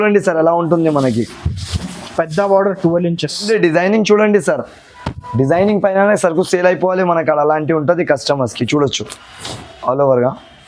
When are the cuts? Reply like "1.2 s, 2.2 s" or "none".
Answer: 3.4 s